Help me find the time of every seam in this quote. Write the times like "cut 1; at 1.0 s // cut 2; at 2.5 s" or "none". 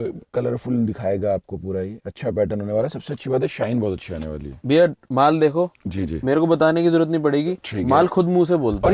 none